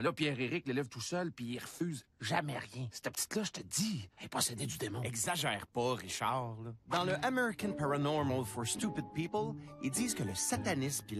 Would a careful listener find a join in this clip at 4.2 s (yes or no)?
no